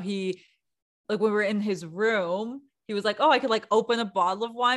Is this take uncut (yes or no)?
yes